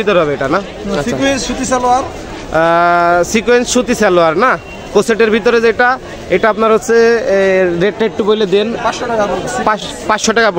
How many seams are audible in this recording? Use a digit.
0